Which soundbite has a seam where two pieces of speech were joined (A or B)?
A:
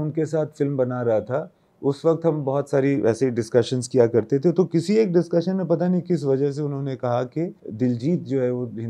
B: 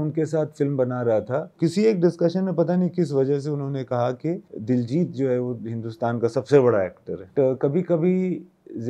B